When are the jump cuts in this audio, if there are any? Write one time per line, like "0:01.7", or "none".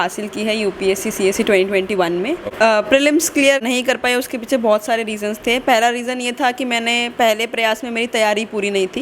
0:02.5
0:03.6